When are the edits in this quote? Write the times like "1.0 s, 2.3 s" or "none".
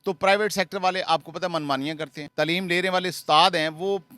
2.2 s